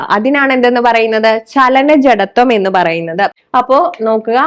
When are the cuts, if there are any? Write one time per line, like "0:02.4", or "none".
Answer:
0:03.4

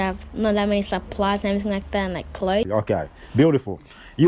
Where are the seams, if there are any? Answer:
0:02.6

